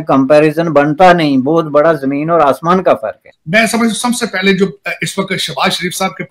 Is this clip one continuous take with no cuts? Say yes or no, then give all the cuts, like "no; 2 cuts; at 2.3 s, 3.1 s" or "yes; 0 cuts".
no; 1 cut; at 3.3 s